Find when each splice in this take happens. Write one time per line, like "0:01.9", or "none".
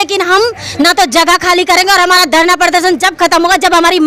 none